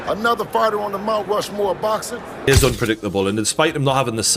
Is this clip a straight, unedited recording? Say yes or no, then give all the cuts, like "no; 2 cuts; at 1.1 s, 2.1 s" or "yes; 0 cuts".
no; 1 cut; at 2.5 s